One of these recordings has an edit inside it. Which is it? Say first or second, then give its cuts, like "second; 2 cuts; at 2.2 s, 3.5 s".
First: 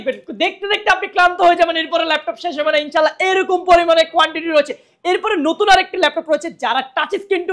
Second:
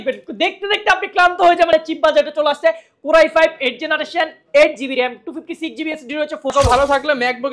second; 2 cuts; at 1.7 s, 6.5 s